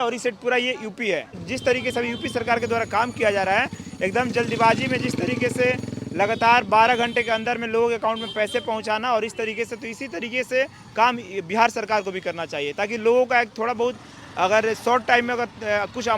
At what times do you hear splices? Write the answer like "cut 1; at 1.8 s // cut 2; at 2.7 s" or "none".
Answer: cut 1; at 1.4 s